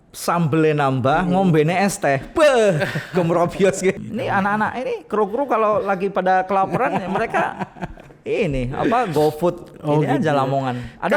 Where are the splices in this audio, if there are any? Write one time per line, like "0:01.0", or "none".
0:04.0